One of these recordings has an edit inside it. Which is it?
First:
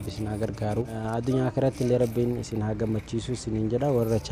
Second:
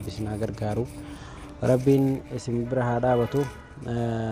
first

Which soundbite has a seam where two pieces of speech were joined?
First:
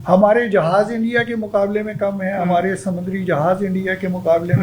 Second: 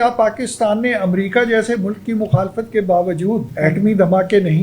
second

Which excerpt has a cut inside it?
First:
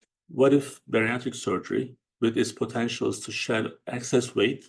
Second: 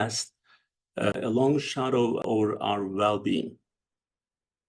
second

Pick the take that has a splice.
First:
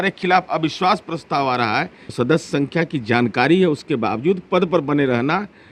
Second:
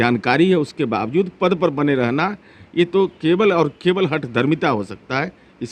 first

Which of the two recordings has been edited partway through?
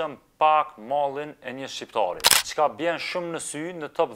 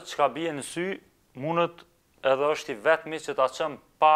first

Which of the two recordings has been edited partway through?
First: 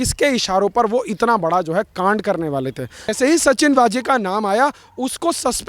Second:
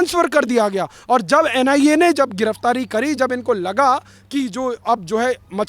first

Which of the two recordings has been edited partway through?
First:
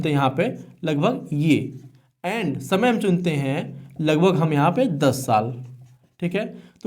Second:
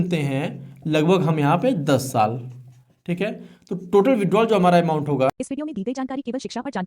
second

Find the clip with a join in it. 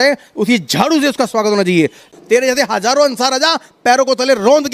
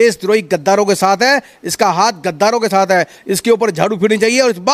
first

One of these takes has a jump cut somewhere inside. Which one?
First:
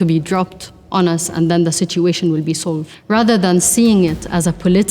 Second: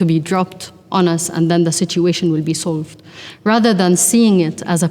first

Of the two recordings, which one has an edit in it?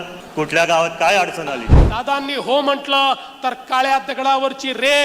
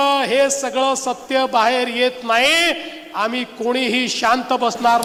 first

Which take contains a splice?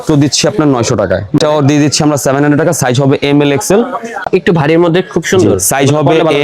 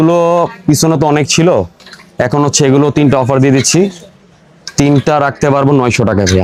first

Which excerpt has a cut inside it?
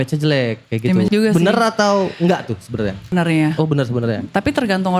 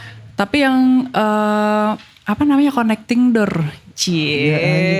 first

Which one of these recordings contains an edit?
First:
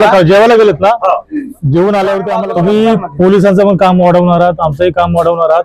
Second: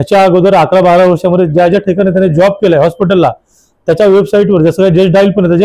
first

